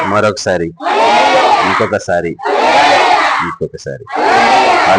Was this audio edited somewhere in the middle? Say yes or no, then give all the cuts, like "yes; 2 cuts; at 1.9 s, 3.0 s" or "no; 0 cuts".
no; 0 cuts